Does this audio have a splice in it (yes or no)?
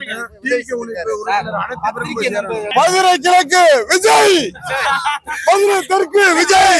yes